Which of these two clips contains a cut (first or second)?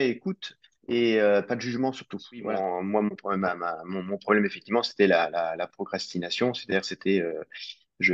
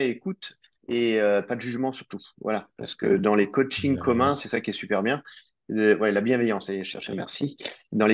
first